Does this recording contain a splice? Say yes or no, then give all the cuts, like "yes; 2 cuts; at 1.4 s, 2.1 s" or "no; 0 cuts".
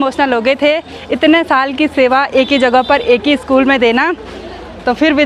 no; 0 cuts